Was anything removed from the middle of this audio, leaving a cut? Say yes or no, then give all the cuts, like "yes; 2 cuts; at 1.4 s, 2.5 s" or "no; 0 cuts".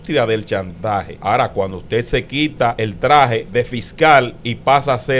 yes; 3 cuts; at 1.1 s, 2.8 s, 3.5 s